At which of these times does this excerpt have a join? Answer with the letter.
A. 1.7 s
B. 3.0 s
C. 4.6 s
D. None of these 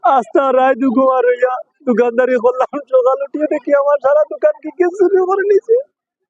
D